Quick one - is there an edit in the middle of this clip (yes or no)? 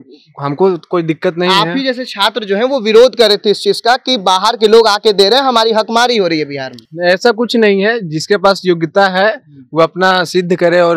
no